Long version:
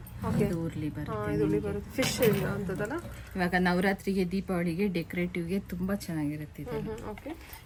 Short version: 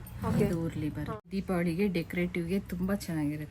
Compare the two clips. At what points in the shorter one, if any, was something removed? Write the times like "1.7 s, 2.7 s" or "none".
1.3 s